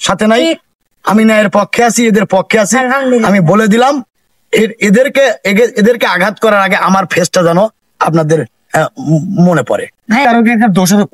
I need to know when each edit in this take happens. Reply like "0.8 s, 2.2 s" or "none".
10.2 s